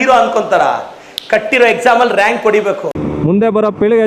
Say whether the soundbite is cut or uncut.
cut